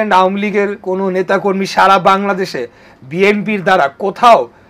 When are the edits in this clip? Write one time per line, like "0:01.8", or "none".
none